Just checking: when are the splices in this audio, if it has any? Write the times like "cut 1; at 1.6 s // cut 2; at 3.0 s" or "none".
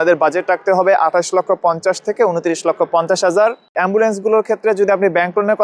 cut 1; at 3.7 s